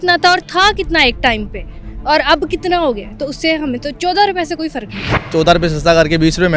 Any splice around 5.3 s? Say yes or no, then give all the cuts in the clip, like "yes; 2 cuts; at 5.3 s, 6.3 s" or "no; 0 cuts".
yes; 1 cut; at 5.3 s